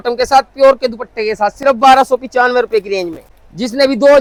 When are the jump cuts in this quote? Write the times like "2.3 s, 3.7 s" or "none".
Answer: none